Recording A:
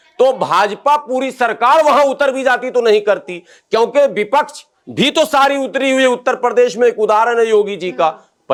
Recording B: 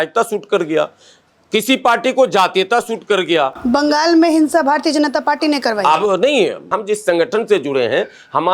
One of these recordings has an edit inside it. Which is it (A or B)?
B